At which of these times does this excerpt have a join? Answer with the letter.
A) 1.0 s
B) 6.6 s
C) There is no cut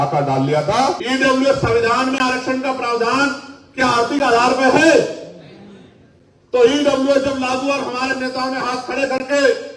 A